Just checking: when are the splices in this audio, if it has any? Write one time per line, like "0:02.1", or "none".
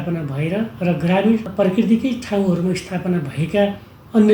0:01.5